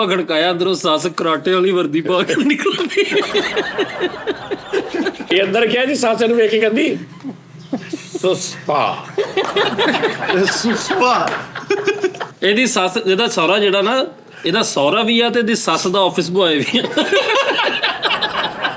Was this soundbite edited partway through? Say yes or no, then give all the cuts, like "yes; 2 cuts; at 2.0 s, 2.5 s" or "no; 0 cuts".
yes; 2 cuts; at 5.2 s, 12.3 s